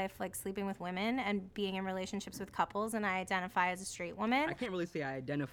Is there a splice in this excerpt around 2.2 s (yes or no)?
no